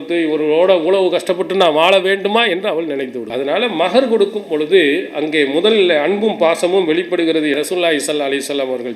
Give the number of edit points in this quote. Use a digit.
2